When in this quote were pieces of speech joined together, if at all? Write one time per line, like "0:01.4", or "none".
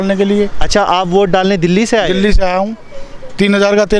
none